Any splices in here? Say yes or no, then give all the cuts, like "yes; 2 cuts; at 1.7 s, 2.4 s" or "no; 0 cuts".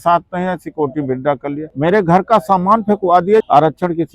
yes; 2 cuts; at 1.7 s, 3.4 s